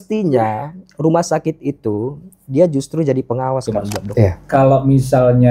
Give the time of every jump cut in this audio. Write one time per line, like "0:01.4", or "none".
0:04.0